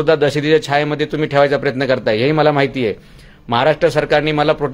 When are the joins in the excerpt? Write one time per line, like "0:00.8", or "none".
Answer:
none